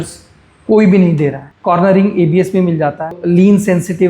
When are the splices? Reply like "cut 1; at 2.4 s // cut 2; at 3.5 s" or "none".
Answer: cut 1; at 1.5 s // cut 2; at 3.2 s